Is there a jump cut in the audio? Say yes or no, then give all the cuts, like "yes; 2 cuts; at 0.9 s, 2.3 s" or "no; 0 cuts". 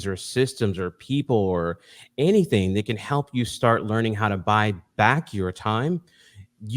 no; 0 cuts